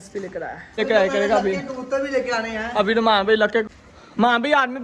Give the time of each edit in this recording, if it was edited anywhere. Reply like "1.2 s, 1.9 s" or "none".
0.8 s, 3.6 s